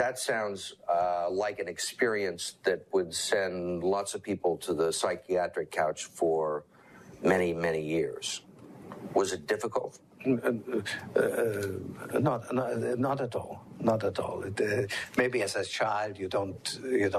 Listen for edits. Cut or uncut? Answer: uncut